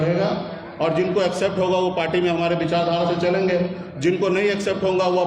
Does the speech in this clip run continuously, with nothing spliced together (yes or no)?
yes